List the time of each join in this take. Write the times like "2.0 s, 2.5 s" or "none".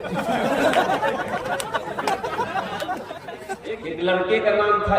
3.6 s